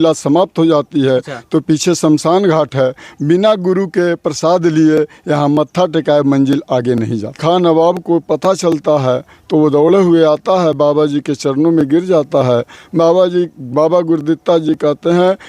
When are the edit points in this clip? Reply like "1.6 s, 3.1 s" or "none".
7.4 s